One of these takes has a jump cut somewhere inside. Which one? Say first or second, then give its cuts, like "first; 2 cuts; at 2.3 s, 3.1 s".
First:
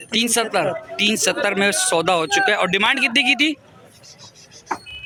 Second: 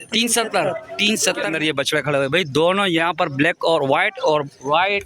second; 1 cut; at 1.5 s